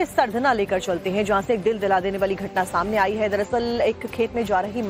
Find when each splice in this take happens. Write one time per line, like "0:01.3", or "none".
0:01.0